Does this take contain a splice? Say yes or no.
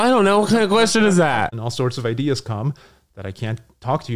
yes